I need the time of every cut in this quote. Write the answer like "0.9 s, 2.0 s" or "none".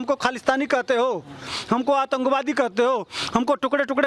none